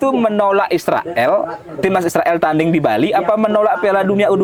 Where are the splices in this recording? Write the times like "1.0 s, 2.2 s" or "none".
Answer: none